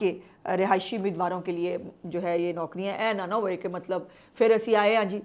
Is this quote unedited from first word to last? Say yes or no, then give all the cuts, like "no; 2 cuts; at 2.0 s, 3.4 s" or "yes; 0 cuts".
yes; 0 cuts